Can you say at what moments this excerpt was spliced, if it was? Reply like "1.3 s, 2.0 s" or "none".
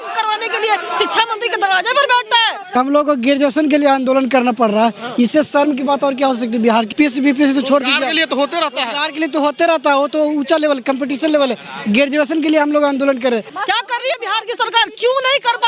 2.8 s, 6.9 s, 13.6 s